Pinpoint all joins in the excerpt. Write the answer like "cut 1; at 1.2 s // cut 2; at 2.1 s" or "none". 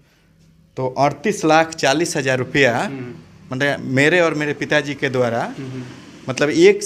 none